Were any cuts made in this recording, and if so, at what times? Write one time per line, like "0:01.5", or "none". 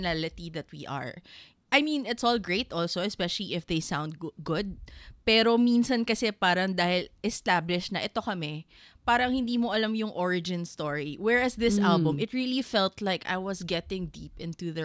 none